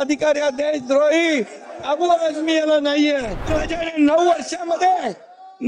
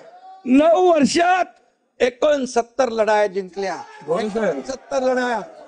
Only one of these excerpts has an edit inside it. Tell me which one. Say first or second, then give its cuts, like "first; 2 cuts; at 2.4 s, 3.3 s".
first; 1 cut; at 3.5 s